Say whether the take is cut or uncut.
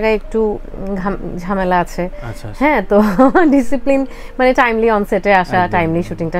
uncut